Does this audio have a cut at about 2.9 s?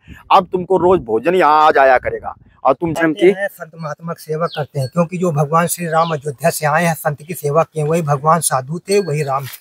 yes; 1 cut; at 2.9 s

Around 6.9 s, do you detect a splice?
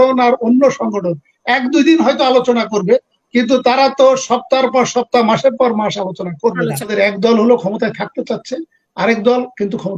yes; 1 cut; at 6.9 s

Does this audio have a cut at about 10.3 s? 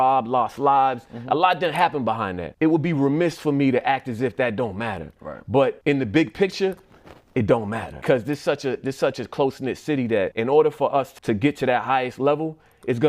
yes; 5 cuts; at 2.5 s, 5.8 s, 8.0 s, 10.3 s, 11.1 s

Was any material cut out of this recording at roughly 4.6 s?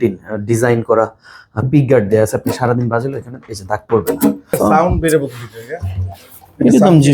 yes; 1 cut; at 4.6 s

